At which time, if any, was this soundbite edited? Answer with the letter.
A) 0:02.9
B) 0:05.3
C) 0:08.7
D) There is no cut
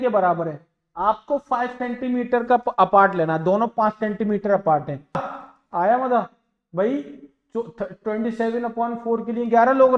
B